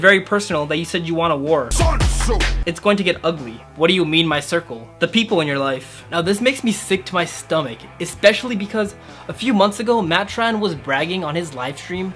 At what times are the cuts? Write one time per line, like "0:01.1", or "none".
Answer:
none

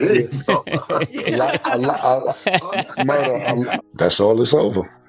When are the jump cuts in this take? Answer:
0:03.8

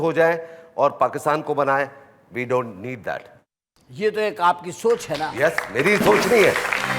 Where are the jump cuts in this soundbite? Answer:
none

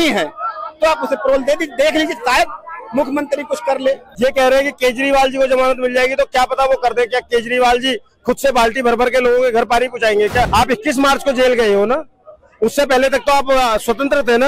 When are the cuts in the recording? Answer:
0:04.1
0:10.5

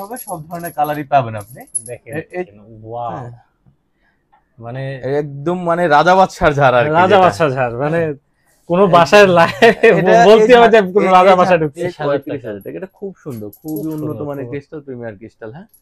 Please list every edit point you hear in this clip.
0:02.5
0:11.9

